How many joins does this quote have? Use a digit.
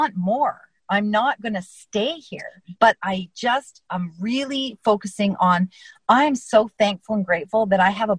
0